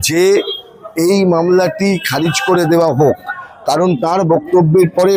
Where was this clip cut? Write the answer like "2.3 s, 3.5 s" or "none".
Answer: none